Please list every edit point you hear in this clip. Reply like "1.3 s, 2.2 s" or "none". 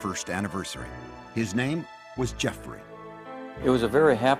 3.2 s